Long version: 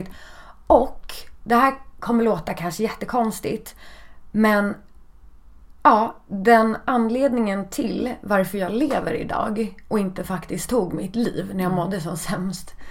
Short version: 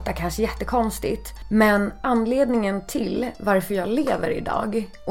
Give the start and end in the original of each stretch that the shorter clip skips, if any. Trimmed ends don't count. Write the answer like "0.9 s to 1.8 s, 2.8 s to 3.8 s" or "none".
3.7 s to 4.1 s, 4.8 s to 6.8 s